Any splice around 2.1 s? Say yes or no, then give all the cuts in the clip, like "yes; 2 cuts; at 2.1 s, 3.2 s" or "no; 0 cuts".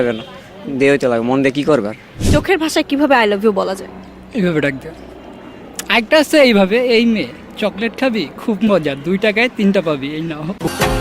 yes; 1 cut; at 2.1 s